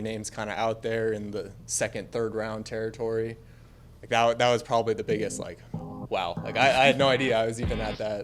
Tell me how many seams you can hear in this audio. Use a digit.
0